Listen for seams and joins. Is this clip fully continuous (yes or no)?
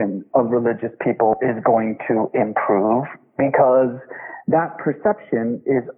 yes